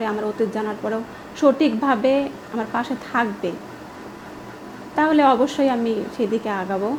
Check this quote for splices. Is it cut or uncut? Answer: uncut